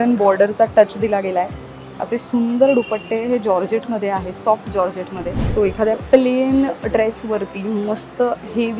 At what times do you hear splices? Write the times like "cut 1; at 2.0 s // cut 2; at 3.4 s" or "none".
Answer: cut 1; at 5.4 s